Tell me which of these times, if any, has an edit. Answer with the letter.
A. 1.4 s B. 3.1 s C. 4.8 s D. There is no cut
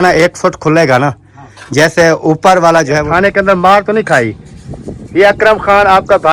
B